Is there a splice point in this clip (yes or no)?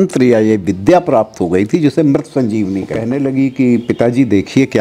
yes